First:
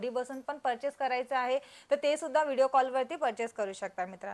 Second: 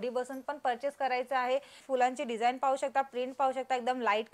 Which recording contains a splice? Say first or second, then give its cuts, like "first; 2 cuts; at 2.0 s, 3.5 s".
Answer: second; 1 cut; at 1.7 s